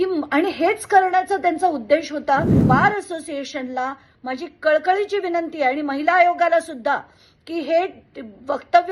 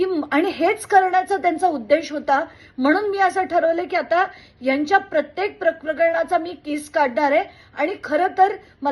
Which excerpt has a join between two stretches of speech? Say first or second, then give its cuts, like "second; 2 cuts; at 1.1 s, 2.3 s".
first; 1 cut; at 2.6 s